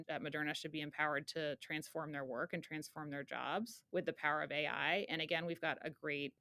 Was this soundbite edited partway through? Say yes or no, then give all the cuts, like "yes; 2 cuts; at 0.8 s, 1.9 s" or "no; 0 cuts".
no; 0 cuts